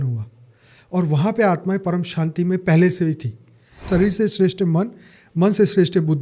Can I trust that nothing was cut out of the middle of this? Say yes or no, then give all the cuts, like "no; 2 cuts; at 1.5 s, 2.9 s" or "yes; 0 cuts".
no; 1 cut; at 3.8 s